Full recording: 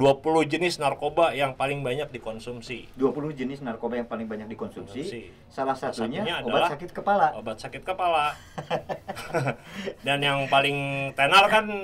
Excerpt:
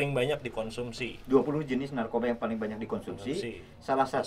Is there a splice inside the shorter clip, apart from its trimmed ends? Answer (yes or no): no